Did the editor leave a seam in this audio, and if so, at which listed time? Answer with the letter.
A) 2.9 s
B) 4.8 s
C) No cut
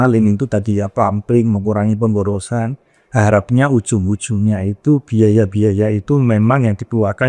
C